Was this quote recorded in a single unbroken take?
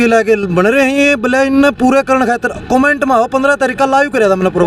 yes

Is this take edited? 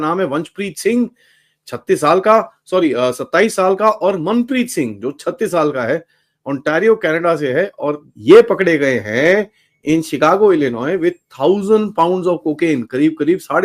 yes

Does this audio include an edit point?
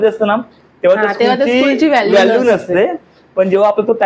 no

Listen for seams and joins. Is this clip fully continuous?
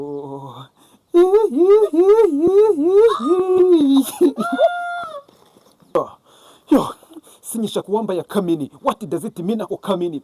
no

